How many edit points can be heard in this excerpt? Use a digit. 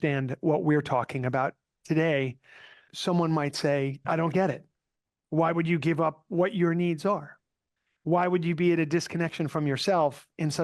2